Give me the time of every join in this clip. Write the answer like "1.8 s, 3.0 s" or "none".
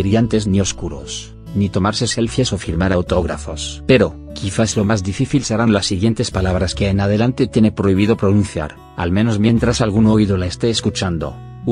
9.6 s